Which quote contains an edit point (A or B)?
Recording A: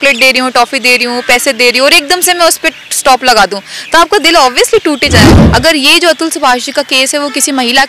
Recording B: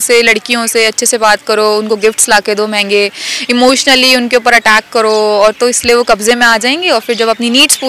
A